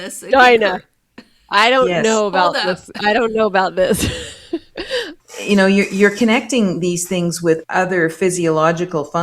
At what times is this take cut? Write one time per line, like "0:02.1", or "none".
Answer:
0:05.2
0:07.6